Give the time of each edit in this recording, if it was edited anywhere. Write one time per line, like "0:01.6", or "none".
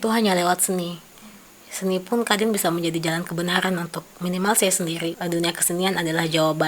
0:05.2